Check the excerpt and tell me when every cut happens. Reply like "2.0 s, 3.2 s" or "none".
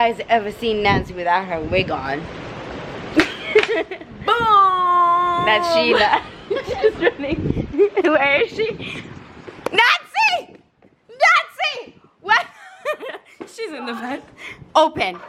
none

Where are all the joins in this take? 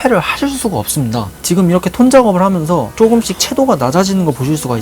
1.3 s

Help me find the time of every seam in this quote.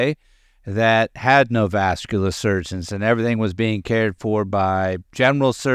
none

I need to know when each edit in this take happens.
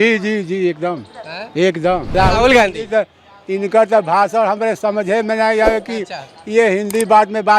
2.1 s

